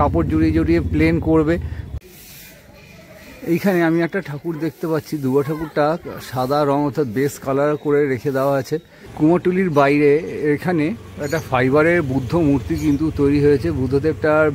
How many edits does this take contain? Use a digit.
2